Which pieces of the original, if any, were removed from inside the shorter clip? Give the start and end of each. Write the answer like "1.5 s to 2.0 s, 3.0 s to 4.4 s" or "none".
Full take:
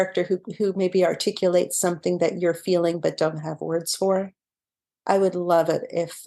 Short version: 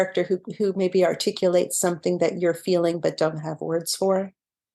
none